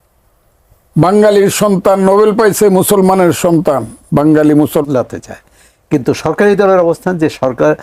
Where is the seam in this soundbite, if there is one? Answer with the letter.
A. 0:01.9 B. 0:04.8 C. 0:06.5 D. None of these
B